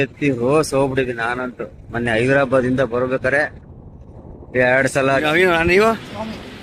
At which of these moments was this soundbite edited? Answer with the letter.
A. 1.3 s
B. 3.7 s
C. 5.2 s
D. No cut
C